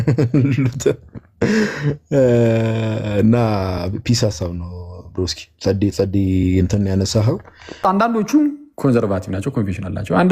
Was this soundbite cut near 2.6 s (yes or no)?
no